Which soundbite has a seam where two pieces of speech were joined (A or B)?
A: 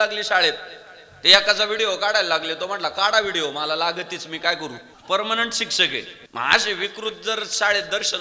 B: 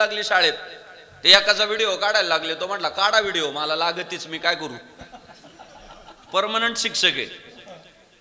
A